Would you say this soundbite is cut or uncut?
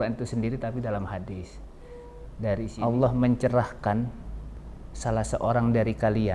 cut